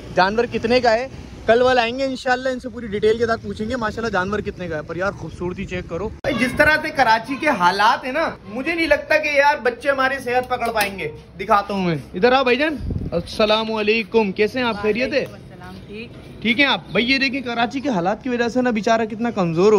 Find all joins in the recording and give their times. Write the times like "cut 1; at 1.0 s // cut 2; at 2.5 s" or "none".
cut 1; at 6.2 s